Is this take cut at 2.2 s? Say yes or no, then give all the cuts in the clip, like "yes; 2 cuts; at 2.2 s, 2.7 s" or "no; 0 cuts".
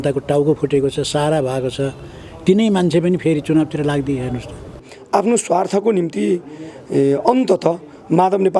no; 1 cut; at 4.9 s